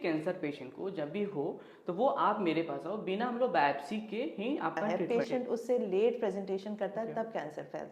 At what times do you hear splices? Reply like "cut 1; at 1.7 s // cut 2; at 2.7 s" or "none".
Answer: cut 1; at 4.9 s